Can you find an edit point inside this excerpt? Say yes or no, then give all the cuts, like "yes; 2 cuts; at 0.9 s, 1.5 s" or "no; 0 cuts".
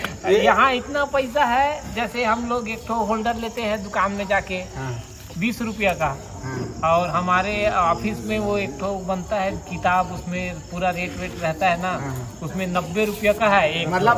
no; 0 cuts